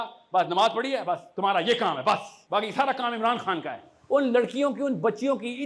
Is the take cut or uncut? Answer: cut